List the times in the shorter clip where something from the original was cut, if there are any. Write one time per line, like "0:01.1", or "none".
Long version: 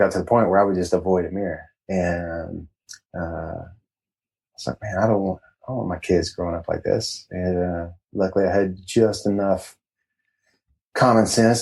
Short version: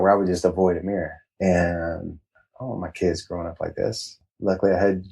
0:02.5
0:04.2